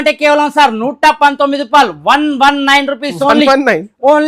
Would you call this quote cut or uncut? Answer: uncut